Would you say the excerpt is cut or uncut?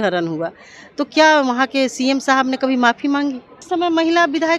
cut